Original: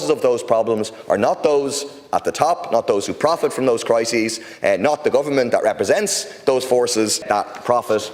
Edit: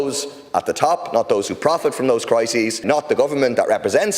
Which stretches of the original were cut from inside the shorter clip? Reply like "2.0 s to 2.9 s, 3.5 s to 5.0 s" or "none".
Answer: 4.4 s to 4.8 s